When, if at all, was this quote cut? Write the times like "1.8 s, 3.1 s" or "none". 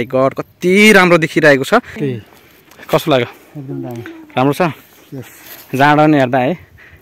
2.0 s